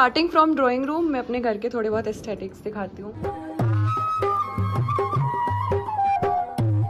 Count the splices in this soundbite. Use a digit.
0